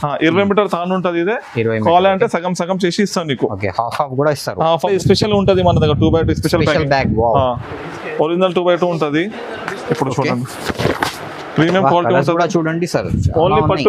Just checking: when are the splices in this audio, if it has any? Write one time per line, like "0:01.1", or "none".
0:04.9